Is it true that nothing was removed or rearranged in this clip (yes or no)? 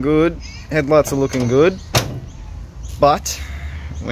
yes